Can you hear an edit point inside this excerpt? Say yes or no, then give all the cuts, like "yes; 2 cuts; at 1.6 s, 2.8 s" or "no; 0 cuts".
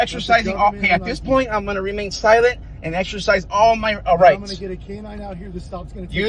no; 0 cuts